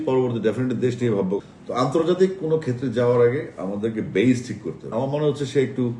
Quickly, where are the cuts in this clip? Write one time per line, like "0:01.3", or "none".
0:01.4
0:04.9